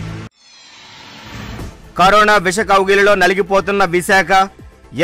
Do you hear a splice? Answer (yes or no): no